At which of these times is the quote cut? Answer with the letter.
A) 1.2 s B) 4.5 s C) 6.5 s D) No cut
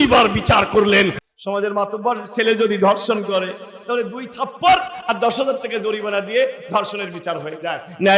A